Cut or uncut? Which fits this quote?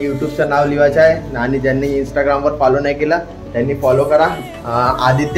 uncut